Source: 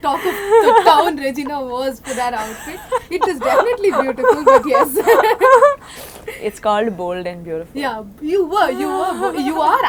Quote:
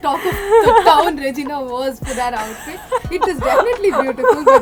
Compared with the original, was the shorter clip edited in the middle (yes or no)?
no